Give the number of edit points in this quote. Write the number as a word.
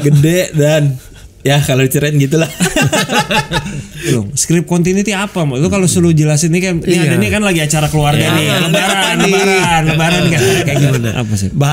two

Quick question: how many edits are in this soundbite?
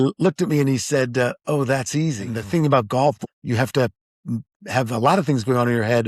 two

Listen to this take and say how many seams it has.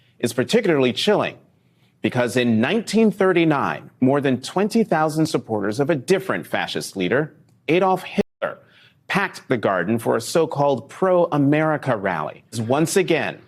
one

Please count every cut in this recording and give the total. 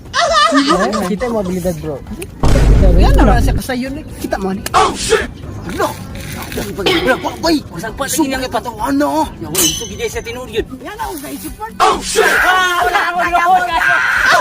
two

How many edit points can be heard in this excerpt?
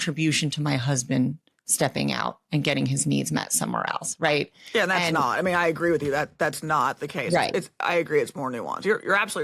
zero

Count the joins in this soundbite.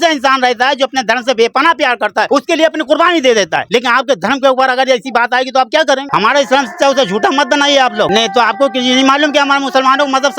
three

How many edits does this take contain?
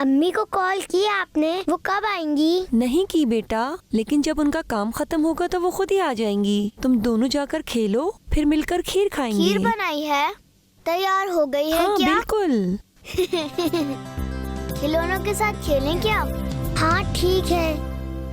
zero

